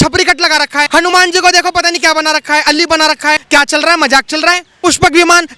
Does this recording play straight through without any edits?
no; 3 cuts; at 0.9 s, 3.4 s, 4.7 s

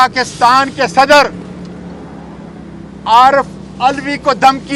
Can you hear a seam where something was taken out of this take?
no; 0 cuts

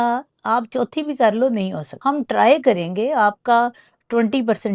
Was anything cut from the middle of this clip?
yes; 1 cut; at 1.8 s

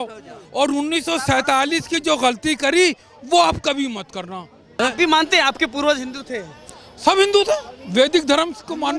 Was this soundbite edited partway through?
yes; 1 cut; at 4.8 s

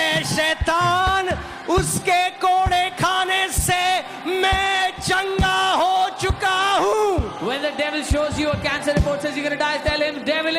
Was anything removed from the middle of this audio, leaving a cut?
no; 0 cuts

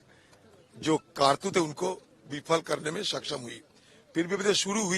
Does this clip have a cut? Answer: no; 0 cuts

